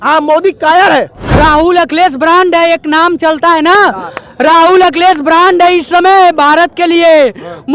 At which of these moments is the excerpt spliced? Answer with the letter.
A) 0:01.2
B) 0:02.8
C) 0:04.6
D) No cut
A